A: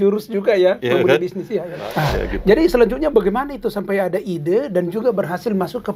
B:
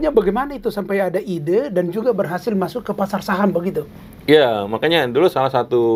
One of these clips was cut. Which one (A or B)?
A